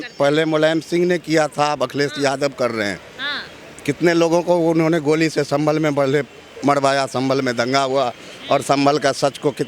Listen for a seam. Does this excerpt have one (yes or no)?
no